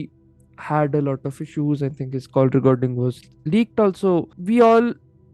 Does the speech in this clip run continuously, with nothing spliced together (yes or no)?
no